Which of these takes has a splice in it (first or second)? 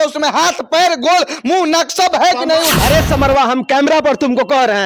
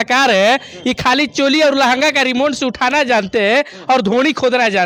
first